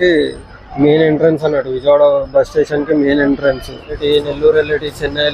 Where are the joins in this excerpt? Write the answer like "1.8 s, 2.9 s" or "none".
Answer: 4.0 s

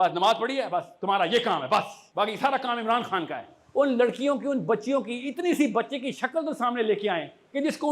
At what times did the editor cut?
2.0 s, 3.5 s

